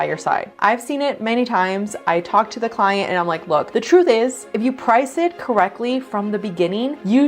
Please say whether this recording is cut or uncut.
cut